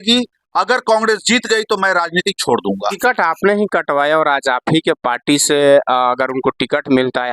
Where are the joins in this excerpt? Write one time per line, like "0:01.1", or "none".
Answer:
0:03.0